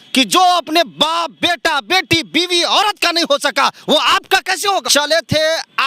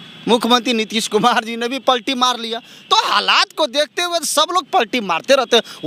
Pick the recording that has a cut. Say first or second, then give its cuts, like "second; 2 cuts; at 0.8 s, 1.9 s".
first; 1 cut; at 4.9 s